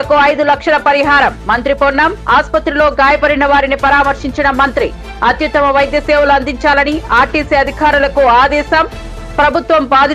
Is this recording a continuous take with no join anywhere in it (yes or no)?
yes